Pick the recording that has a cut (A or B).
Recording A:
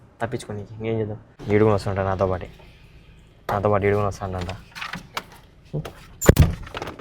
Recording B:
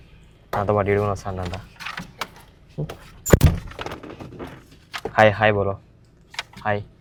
A